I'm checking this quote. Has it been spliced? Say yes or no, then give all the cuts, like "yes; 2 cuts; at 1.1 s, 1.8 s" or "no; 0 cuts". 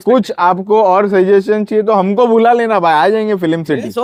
no; 0 cuts